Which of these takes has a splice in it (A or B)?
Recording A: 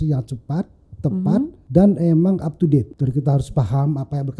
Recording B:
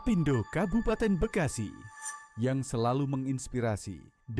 A